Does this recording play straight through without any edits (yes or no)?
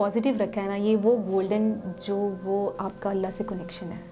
yes